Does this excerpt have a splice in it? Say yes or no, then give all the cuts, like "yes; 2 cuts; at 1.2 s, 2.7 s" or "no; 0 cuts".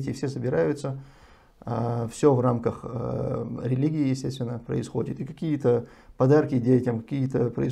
no; 0 cuts